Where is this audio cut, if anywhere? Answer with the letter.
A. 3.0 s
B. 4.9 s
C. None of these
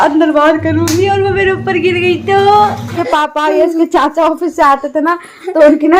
A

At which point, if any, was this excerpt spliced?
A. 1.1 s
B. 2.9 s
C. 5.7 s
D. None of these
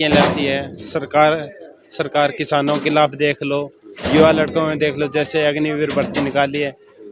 D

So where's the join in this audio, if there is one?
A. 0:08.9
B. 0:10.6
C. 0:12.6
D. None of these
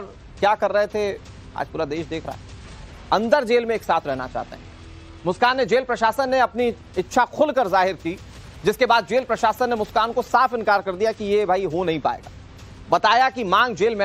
A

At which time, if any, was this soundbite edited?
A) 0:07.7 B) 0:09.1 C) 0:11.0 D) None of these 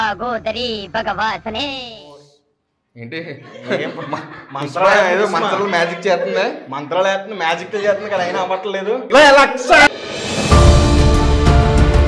B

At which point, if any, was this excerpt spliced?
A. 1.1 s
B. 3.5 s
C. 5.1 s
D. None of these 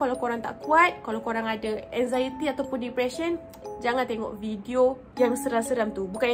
C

